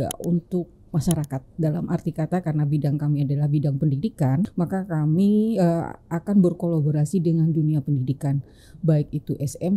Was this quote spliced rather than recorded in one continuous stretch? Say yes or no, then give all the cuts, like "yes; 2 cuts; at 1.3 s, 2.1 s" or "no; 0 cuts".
yes; 1 cut; at 4.5 s